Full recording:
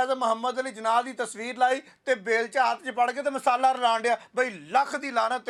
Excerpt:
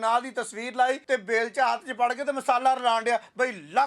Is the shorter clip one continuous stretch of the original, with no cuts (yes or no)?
no